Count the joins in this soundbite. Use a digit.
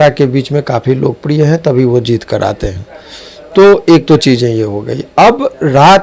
0